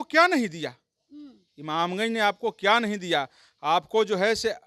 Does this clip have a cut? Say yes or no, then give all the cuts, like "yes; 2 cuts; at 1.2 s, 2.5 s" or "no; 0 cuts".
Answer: no; 0 cuts